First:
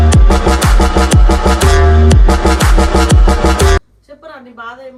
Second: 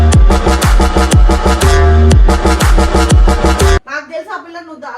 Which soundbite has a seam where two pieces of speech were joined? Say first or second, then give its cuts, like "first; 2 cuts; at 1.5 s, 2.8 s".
second; 1 cut; at 3.9 s